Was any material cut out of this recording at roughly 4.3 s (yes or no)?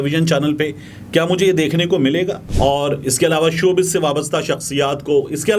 no